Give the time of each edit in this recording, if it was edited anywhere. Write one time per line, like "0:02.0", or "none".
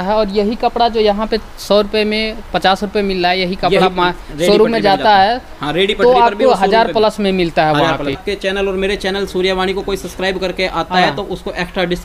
0:08.2